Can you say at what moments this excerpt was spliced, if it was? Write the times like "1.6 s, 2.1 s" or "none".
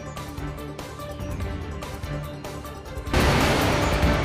2.7 s